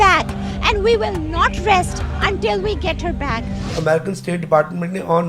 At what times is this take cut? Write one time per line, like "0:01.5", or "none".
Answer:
0:03.6